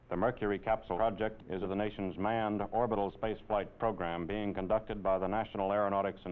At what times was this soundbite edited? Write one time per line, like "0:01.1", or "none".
0:01.0